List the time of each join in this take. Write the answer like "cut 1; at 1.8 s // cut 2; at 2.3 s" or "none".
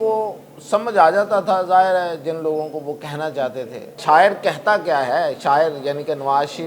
cut 1; at 3.9 s